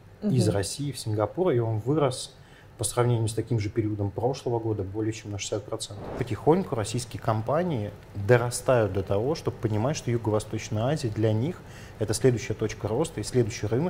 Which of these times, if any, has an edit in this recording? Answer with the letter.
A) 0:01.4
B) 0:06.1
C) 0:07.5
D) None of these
B